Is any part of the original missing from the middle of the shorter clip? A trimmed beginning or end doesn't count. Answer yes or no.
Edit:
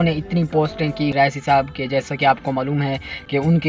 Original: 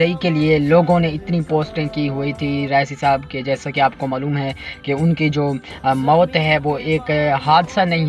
yes